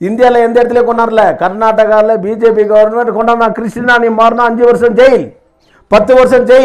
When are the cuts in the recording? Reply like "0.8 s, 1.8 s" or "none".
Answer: none